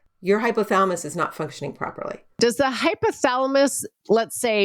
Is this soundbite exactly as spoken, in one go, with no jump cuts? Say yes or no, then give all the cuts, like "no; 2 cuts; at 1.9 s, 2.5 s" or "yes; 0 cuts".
no; 1 cut; at 2.4 s